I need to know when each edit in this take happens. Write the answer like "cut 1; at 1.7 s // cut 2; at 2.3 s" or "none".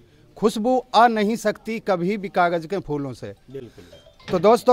none